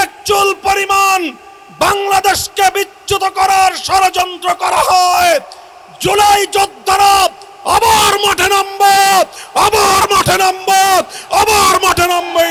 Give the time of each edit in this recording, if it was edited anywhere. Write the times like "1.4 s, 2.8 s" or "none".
none